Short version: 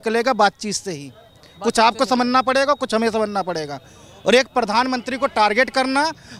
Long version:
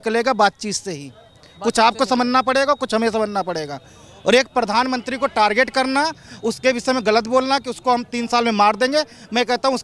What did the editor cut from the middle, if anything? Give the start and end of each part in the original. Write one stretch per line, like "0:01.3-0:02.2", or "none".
none